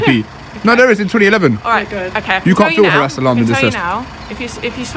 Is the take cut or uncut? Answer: uncut